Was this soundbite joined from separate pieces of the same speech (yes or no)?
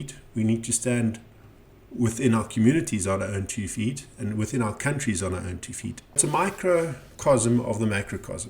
yes